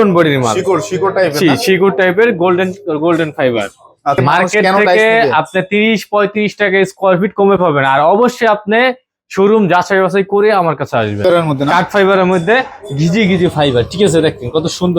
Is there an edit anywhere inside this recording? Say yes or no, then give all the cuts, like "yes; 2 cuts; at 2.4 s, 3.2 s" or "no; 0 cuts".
yes; 2 cuts; at 4.2 s, 11.2 s